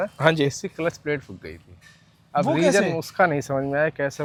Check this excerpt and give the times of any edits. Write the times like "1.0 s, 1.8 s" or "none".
none